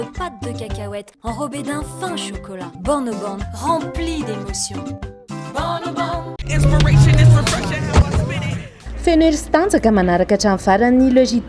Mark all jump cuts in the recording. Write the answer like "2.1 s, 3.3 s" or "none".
6.3 s

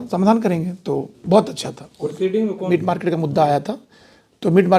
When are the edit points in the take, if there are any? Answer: 2.7 s

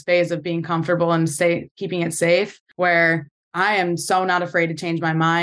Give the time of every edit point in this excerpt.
2.6 s

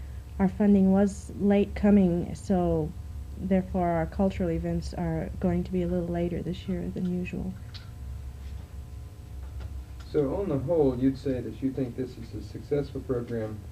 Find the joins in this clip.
3.3 s

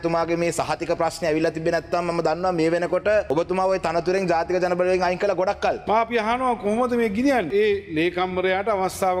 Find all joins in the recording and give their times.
3.3 s, 5.8 s, 7.5 s

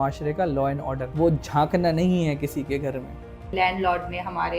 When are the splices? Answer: 1.1 s, 3.5 s

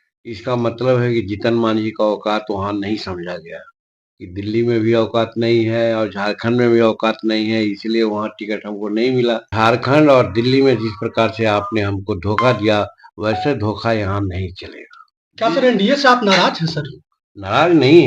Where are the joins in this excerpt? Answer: 9.5 s

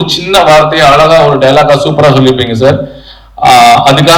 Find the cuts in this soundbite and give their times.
none

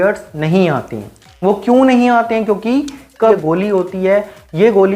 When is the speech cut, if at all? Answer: 3.4 s

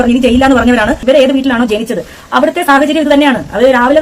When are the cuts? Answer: 1.0 s

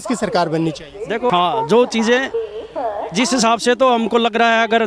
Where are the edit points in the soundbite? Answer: 1.3 s

